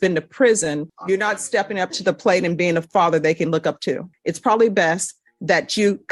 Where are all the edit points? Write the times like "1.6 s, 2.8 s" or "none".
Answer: 0.9 s, 4.2 s